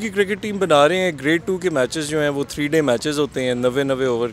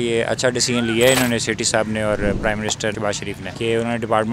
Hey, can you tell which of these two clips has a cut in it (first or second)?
second